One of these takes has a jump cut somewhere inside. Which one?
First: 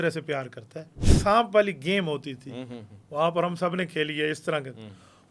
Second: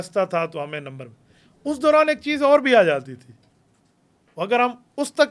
first; 1 cut; at 1.1 s

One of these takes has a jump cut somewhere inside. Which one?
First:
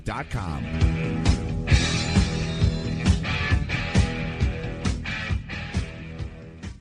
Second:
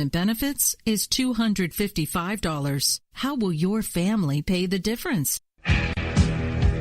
second; 1 cut; at 5.6 s

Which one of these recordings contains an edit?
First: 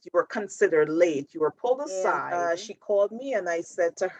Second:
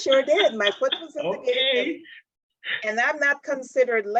first; 1 cut; at 2.2 s

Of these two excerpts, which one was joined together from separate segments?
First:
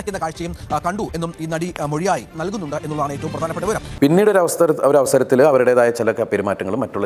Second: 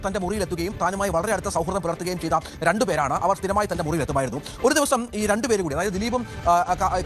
first; 1 cut; at 3.9 s

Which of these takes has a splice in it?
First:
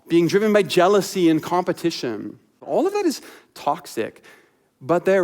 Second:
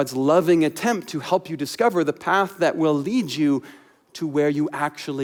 first; 1 cut; at 2.6 s

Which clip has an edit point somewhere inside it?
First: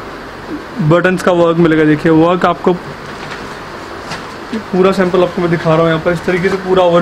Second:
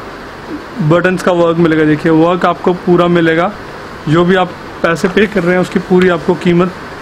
first; 1 cut; at 2.8 s

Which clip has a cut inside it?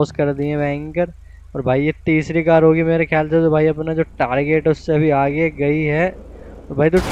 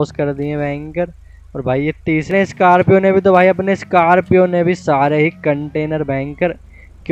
second; 1 cut; at 2.3 s

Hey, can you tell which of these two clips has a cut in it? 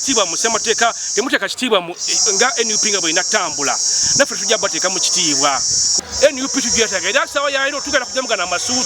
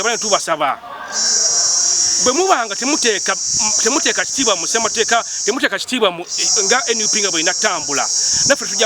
first; 1 cut; at 5.9 s

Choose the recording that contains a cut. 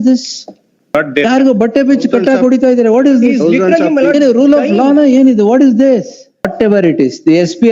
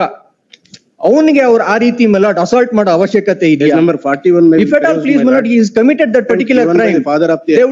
first; 2 cuts; at 0.9 s, 6.5 s

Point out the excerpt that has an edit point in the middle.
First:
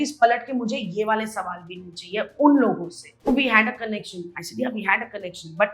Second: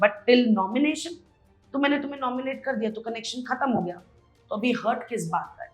first; 1 cut; at 3.1 s

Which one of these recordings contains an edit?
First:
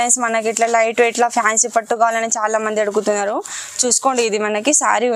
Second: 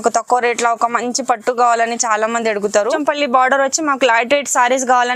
second; 1 cut; at 3.0 s

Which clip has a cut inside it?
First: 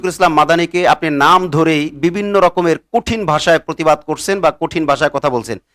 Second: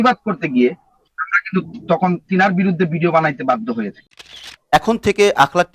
second; 1 cut; at 4.3 s

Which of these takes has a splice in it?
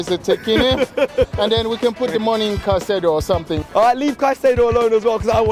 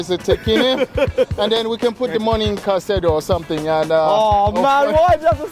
first; 1 cut; at 3.6 s

